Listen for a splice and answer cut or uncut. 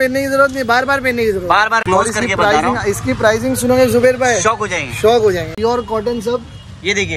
cut